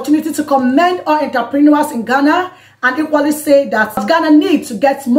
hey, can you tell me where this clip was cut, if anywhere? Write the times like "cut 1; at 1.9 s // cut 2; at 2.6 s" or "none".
none